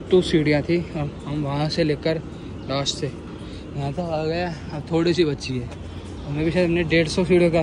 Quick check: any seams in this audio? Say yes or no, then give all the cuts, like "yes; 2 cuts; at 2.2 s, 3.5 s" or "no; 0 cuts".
no; 0 cuts